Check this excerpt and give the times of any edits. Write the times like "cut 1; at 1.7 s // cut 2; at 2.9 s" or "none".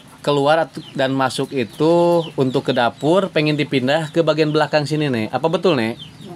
none